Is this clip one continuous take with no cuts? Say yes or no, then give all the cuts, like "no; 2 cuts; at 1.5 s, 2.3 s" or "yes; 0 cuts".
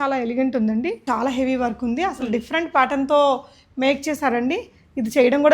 no; 1 cut; at 1.0 s